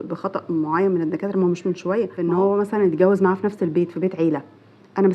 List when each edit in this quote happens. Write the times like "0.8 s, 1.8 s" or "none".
2.2 s